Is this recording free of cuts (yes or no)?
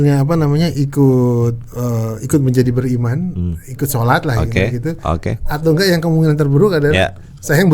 yes